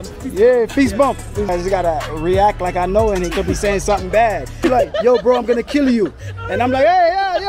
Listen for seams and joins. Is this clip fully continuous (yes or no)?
no